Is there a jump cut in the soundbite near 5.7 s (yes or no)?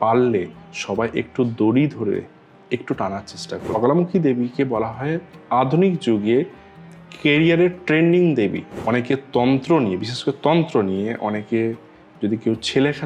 no